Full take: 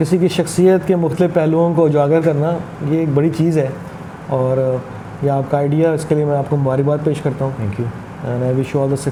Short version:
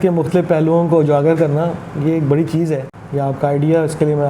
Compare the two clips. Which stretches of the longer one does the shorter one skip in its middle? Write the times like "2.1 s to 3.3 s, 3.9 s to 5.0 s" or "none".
3.8 s to 5.1 s